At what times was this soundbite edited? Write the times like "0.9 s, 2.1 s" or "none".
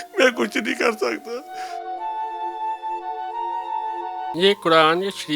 4.2 s